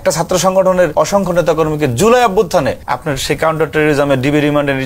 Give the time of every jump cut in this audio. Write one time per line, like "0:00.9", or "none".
0:00.9
0:02.8